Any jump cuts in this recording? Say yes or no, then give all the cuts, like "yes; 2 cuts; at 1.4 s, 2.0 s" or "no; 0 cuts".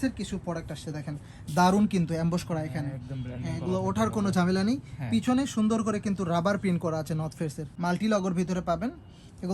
yes; 1 cut; at 7.6 s